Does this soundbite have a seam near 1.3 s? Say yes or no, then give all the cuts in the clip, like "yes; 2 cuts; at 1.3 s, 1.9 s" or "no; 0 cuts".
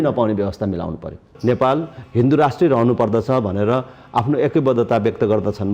yes; 1 cut; at 1.3 s